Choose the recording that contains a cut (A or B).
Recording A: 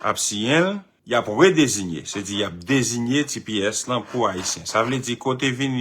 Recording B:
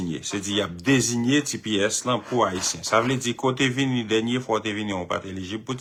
A